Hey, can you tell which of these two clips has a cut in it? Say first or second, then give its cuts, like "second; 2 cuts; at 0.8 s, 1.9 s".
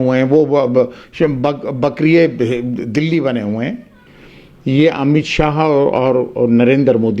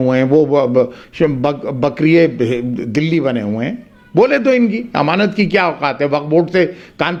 first; 1 cut; at 3.9 s